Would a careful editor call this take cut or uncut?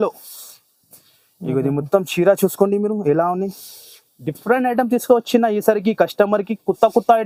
uncut